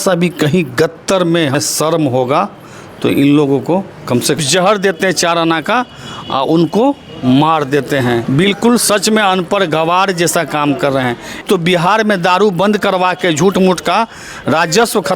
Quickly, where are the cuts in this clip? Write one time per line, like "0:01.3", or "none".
0:01.6
0:04.4
0:08.2
0:11.4